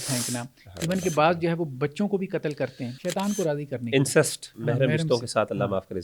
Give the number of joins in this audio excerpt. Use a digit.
2